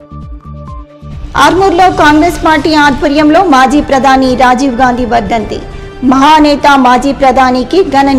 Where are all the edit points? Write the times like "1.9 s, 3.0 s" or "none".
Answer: 1.0 s